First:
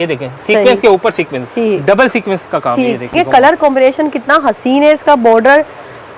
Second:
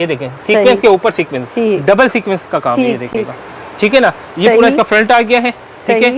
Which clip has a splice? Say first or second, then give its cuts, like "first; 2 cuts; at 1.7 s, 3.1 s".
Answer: first; 1 cut; at 3.1 s